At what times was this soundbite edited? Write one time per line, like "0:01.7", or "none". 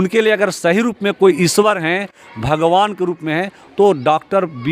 none

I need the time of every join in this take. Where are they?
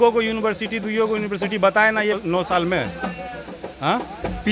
0:02.2

